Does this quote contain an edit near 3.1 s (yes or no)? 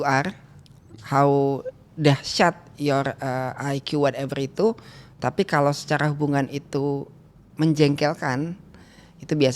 no